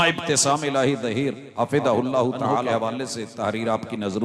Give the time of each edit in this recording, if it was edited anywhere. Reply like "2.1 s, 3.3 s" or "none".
1.4 s, 2.7 s